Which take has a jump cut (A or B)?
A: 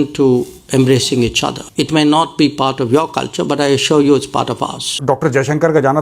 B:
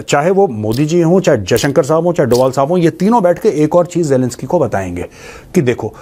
A